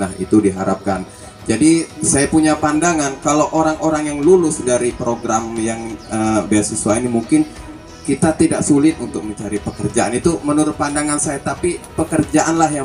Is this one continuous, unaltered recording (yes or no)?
yes